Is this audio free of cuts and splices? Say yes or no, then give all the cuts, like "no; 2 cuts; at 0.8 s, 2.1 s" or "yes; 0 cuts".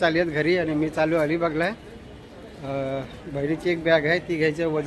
yes; 0 cuts